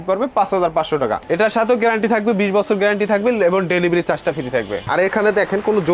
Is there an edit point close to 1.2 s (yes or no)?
yes